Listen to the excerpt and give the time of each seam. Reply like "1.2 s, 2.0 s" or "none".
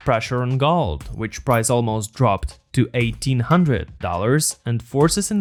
none